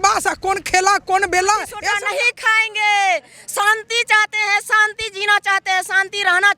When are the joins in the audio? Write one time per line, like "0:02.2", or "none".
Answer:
0:01.7